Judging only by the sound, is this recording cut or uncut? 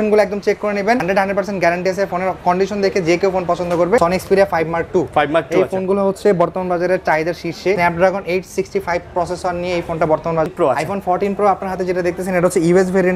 cut